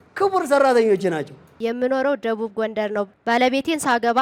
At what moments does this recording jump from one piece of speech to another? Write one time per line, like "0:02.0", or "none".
0:01.6
0:03.1